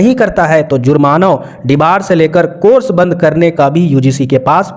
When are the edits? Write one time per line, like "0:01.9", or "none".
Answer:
none